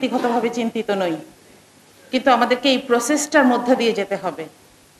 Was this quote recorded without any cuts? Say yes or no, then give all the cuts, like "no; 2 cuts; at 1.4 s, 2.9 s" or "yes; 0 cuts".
yes; 0 cuts